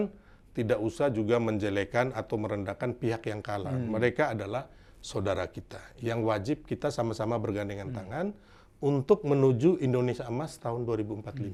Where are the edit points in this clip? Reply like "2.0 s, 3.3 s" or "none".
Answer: none